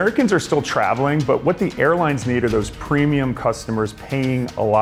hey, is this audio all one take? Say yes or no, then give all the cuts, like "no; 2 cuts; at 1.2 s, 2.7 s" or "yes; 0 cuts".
yes; 0 cuts